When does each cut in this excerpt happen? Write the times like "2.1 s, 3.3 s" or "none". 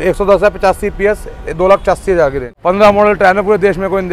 2.4 s